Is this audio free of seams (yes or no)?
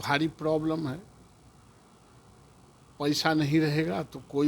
yes